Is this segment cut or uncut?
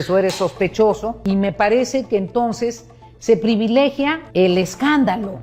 cut